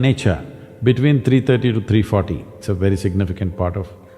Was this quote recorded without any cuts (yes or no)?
no